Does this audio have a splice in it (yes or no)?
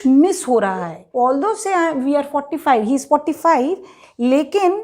yes